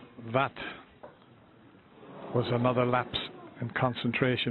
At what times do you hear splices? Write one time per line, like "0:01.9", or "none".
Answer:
0:01.8